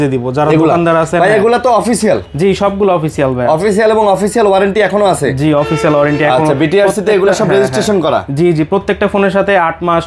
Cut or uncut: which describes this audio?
uncut